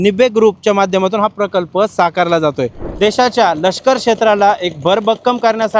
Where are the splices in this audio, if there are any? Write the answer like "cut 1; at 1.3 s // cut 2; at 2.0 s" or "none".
cut 1; at 2.8 s

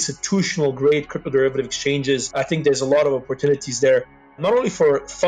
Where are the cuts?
cut 1; at 2.3 s

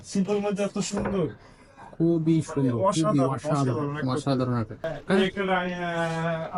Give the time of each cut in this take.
cut 1; at 5.2 s

